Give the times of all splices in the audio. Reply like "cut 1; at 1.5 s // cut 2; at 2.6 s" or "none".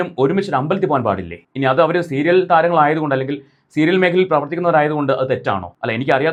none